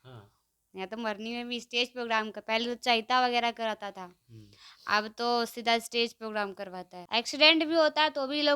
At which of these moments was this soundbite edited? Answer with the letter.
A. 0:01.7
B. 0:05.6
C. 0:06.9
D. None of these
C